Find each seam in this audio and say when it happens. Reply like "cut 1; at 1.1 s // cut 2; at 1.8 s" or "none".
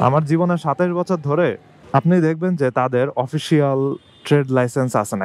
cut 1; at 1.7 s